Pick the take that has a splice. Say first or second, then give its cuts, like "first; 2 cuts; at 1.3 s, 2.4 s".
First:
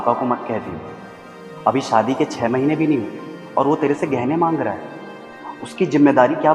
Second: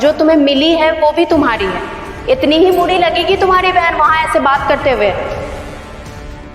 second; 1 cut; at 5.2 s